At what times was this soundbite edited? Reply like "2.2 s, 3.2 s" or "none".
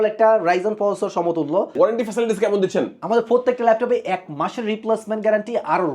1.7 s